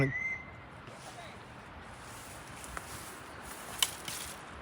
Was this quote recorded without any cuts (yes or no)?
yes